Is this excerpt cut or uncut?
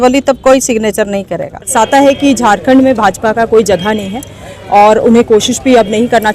cut